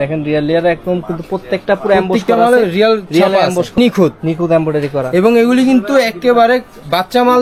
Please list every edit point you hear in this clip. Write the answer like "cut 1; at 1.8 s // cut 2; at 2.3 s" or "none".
cut 1; at 3.8 s

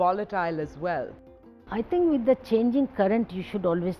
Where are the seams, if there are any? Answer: cut 1; at 1.6 s

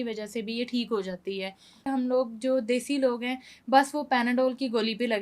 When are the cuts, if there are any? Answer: cut 1; at 1.8 s

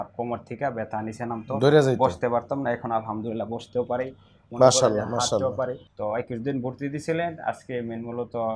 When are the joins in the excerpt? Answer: cut 1; at 5.9 s

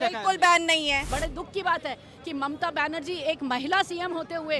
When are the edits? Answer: cut 1; at 1.1 s

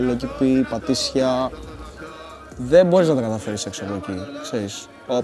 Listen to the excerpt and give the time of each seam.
none

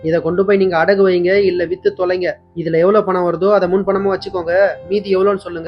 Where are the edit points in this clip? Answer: none

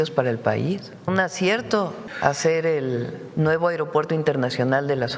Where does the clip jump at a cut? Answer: cut 1; at 1.1 s // cut 2; at 2.0 s // cut 3; at 3.2 s

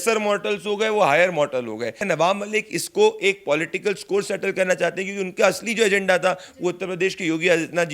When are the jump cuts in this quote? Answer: cut 1; at 2.0 s

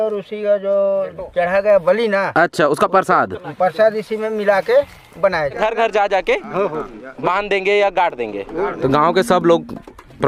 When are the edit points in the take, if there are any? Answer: cut 1; at 5.5 s // cut 2; at 8.8 s

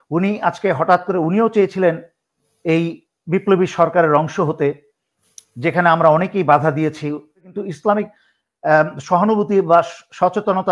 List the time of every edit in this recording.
cut 1; at 7.5 s

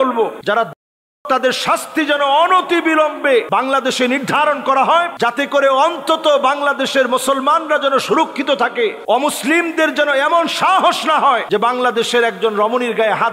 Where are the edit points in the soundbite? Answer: none

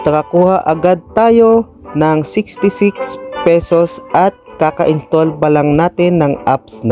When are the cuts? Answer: none

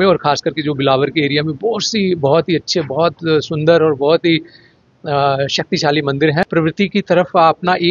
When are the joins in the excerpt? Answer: cut 1; at 6.4 s

